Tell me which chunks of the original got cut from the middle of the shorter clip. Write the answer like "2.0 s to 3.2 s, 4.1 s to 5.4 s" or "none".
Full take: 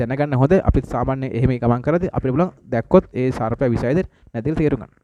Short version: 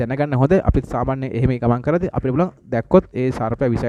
none